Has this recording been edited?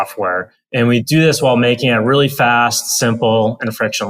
yes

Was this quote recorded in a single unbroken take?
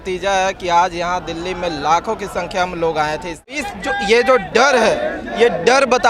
no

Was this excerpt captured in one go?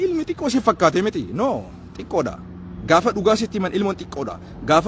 yes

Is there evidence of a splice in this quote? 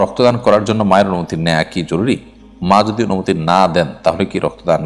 no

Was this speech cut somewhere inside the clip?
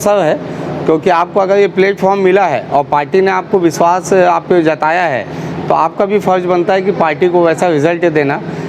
no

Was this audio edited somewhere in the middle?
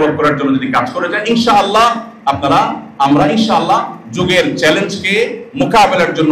no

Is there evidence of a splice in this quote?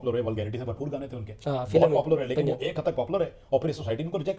no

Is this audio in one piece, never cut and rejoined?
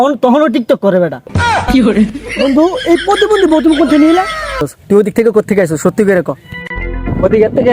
no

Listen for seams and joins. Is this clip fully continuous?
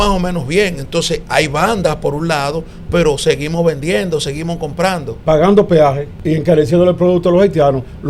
no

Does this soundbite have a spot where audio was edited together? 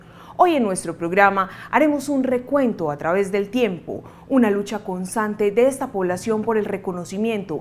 no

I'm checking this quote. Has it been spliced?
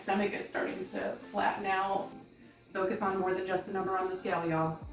yes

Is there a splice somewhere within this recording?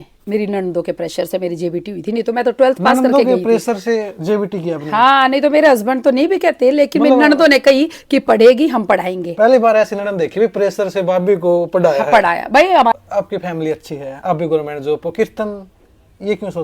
yes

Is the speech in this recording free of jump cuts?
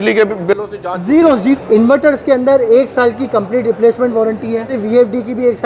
no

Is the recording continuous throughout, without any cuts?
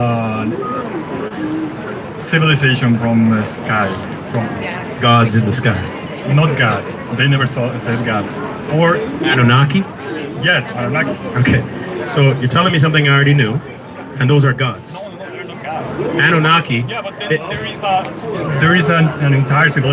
yes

